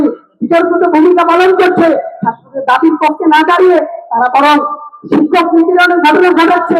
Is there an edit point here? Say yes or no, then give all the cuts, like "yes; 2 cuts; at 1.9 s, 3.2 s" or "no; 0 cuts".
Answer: no; 0 cuts